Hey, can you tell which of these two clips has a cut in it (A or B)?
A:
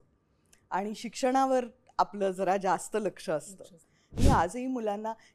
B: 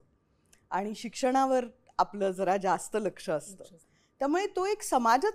A